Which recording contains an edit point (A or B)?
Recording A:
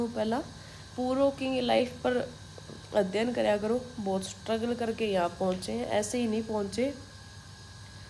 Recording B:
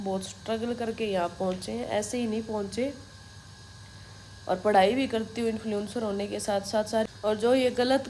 B